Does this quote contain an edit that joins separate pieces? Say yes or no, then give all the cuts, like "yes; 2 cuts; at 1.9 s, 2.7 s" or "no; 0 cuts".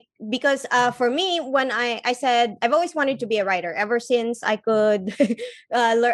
no; 0 cuts